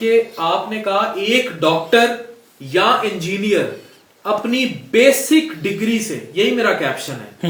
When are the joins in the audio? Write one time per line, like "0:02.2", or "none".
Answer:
none